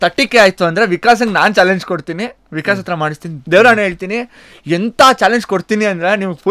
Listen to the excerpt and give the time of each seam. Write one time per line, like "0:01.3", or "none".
0:03.3